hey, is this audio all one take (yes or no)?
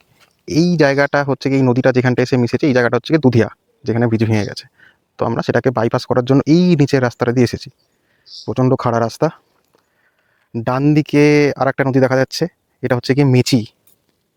yes